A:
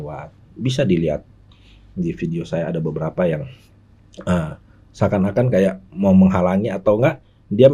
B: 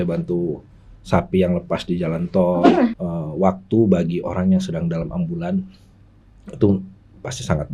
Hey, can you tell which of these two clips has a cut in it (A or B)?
B